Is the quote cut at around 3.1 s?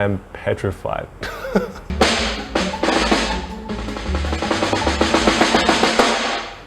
no; 1 cut; at 1.9 s

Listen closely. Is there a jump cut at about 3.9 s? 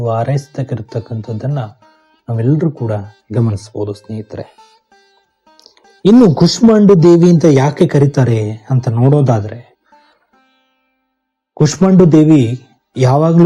no; 0 cuts

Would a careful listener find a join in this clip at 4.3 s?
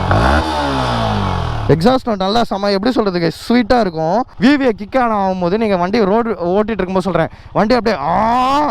yes; 1 cut; at 4.3 s

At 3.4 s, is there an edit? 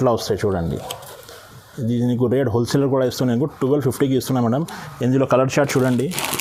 no; 0 cuts

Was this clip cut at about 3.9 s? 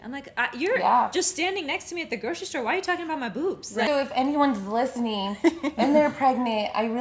yes; 1 cut; at 3.9 s

